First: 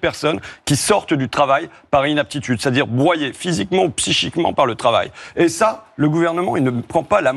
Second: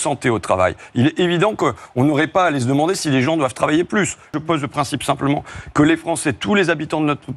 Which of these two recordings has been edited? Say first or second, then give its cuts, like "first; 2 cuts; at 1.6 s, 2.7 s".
second; 1 cut; at 4.4 s